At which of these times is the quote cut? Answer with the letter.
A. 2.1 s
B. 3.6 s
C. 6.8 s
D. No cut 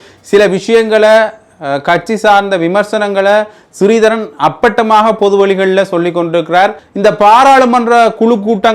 C